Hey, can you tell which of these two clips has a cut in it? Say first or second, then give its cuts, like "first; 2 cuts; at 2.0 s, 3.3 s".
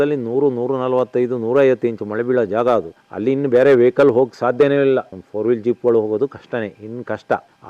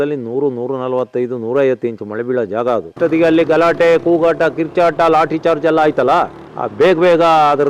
second; 1 cut; at 2.9 s